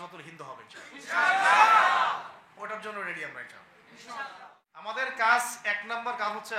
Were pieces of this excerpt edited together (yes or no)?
yes